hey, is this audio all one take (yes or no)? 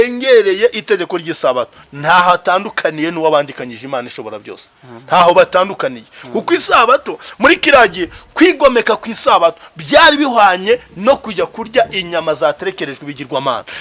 yes